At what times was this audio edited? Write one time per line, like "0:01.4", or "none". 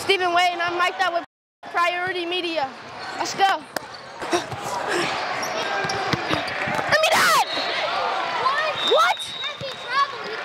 0:04.1

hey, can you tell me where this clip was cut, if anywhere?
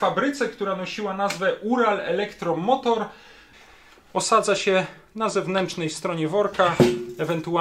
0:03.5

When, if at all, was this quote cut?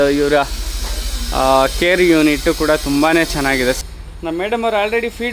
0:03.8

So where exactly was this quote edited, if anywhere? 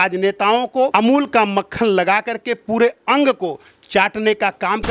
0:00.9

